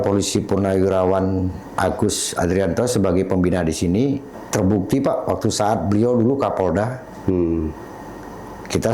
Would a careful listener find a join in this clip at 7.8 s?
no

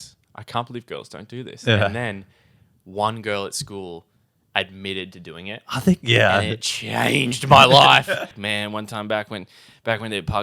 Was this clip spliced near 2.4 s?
no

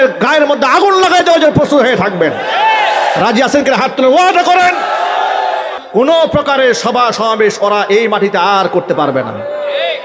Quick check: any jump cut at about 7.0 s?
no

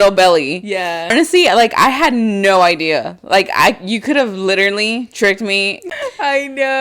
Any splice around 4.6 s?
no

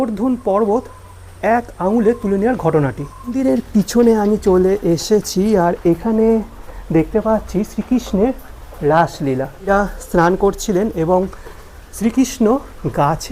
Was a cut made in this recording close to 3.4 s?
yes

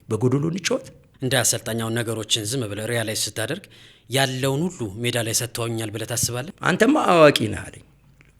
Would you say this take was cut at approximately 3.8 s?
no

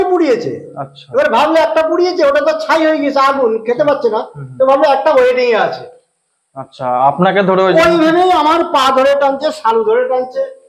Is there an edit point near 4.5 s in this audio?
no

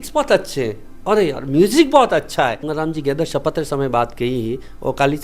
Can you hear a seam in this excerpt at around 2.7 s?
yes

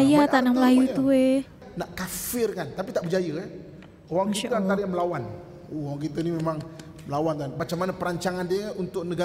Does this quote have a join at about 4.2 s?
no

